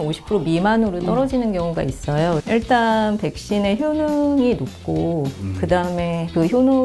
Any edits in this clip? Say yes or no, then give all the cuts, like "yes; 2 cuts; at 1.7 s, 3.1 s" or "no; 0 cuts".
yes; 1 cut; at 2.4 s